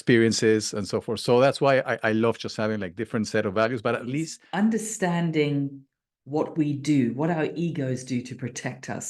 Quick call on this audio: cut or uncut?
cut